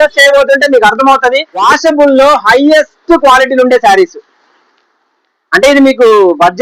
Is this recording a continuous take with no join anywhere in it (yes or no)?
no